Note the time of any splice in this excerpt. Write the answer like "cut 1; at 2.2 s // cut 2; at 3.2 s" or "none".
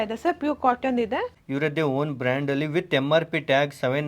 cut 1; at 1.4 s